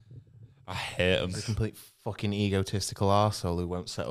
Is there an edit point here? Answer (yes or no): yes